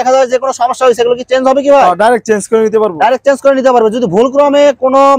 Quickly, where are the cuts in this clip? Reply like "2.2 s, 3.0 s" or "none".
none